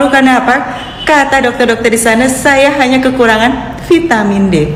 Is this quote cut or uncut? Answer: uncut